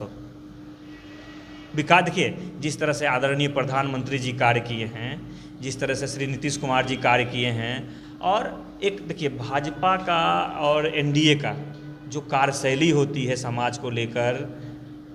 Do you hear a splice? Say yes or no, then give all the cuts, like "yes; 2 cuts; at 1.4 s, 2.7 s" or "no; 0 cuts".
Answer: no; 0 cuts